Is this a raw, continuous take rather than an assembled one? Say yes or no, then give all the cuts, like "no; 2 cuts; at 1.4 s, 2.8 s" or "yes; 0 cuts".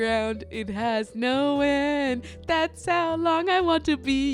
yes; 0 cuts